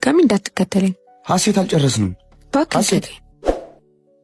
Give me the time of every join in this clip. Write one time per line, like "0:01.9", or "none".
0:03.2

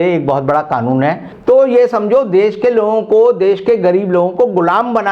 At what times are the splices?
0:01.3

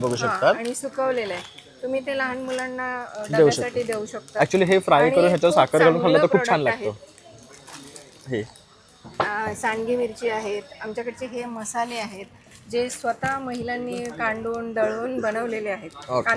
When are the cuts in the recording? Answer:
none

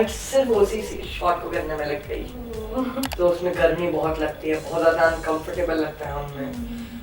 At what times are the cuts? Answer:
0:03.1

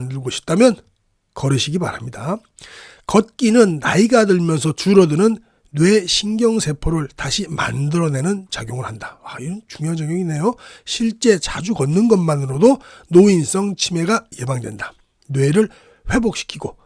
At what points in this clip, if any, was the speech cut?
none

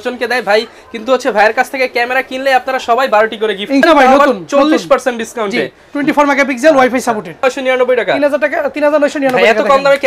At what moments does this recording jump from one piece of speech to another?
0:03.8
0:07.4

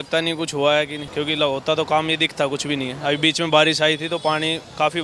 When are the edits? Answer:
0:01.0

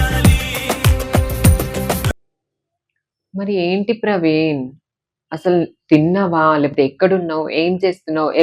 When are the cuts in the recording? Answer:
0:02.1

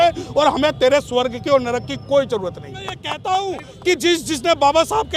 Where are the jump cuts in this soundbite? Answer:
0:03.1

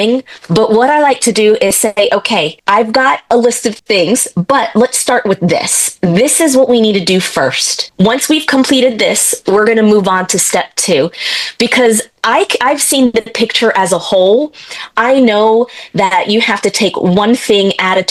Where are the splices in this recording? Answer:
none

